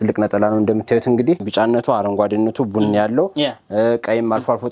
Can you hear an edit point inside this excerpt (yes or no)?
yes